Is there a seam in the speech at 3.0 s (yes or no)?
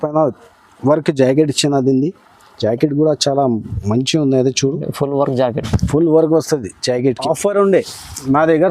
no